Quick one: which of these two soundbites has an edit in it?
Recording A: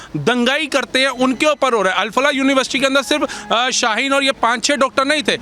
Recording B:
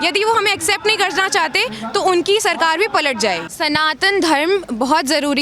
B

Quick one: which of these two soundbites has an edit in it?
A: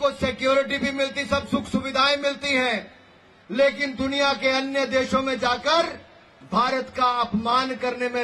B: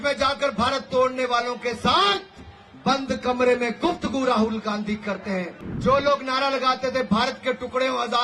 B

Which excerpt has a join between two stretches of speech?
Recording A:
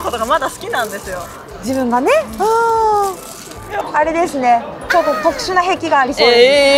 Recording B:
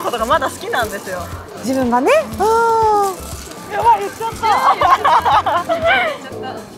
A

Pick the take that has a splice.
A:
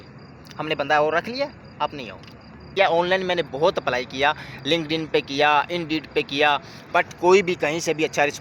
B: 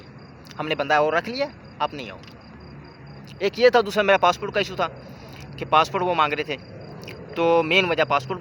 A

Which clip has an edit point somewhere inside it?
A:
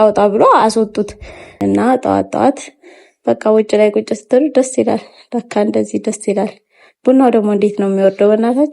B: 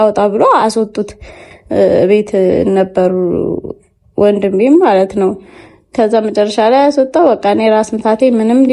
A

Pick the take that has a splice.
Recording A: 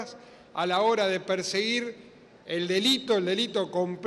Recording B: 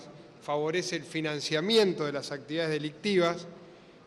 B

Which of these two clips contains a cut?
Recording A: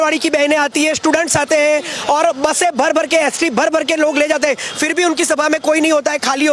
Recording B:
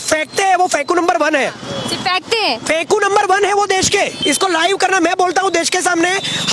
B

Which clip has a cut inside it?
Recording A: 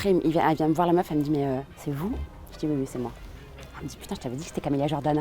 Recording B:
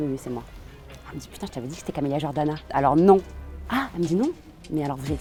A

